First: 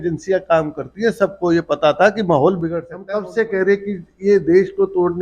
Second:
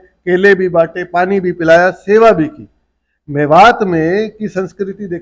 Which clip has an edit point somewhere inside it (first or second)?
first